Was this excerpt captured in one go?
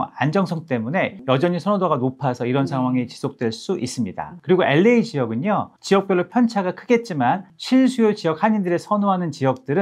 no; 4 cuts; at 1.2 s, 4.3 s, 5.7 s, 7.5 s

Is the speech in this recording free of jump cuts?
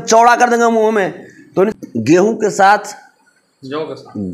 no; 1 cut; at 1.8 s

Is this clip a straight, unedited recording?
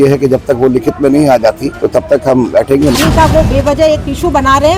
no; 2 cuts; at 1.7 s, 3.0 s

